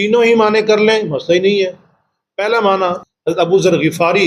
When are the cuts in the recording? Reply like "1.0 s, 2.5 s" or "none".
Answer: 3.0 s